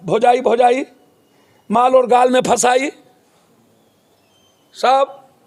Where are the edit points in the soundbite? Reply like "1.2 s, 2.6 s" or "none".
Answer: none